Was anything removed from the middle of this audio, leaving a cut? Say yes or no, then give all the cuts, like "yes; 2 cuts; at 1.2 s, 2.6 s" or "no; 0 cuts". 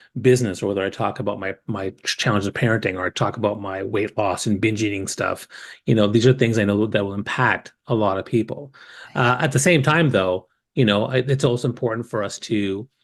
no; 0 cuts